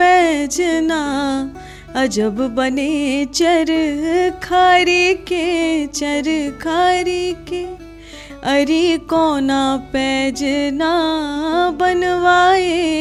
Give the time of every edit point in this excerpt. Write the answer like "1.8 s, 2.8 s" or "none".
none